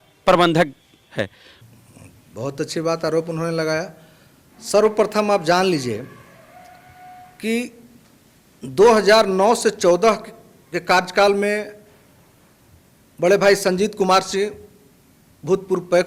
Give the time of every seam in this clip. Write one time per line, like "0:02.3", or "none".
0:01.8